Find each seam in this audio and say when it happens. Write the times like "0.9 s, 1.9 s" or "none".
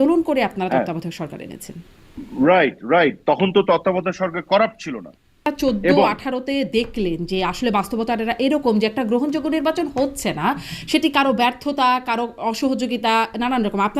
5.5 s